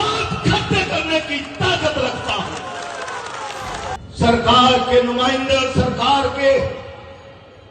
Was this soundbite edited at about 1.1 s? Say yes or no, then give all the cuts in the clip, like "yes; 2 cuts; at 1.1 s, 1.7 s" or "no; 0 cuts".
no; 1 cut; at 4.0 s